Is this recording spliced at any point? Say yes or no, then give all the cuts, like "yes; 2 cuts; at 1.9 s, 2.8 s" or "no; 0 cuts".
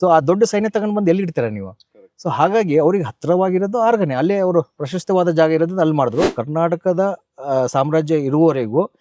yes; 1 cut; at 6.3 s